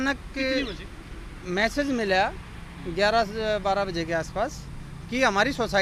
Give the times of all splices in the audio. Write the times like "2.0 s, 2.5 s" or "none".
none